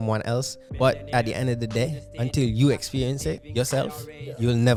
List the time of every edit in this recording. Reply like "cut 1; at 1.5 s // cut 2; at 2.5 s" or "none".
none

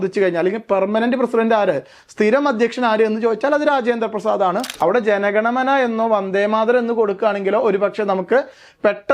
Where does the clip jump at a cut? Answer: cut 1; at 4.7 s

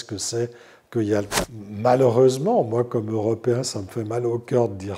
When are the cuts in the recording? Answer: cut 1; at 1.4 s

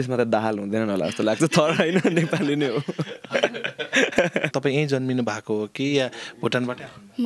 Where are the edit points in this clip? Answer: cut 1; at 4.5 s

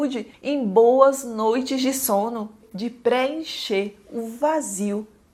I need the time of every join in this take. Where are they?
none

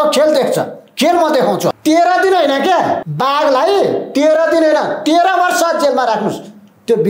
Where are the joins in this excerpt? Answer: cut 1; at 1.8 s // cut 2; at 3.1 s

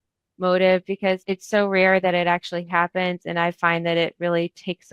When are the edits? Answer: cut 1; at 1.2 s

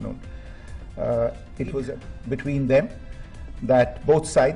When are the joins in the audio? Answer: cut 1; at 1.9 s

